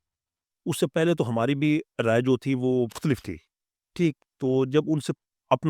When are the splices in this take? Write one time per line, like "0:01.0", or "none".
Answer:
0:03.0